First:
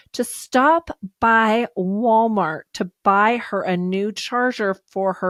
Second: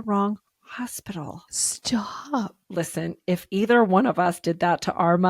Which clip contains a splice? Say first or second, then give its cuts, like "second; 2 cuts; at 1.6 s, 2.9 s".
second; 1 cut; at 2.6 s